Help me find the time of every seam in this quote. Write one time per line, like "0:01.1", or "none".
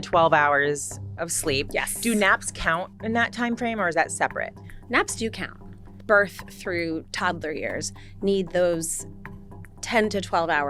0:05.8